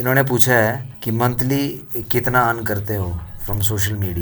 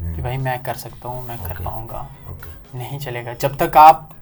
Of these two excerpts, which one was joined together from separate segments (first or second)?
first